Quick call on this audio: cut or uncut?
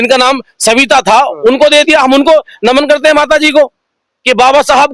uncut